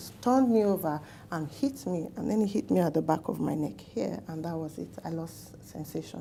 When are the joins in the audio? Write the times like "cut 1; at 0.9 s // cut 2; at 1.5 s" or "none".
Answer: none